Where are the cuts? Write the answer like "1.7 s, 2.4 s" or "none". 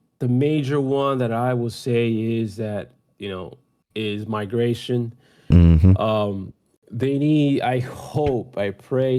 none